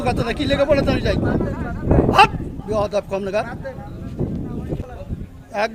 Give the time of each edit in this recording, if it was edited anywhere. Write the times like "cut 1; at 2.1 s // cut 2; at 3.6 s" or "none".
cut 1; at 4.8 s